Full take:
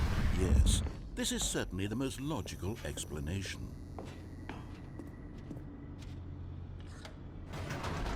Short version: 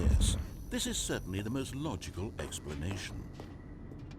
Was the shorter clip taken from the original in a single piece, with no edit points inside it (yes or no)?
no